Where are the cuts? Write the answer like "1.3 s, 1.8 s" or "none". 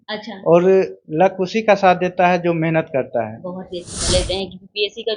4.1 s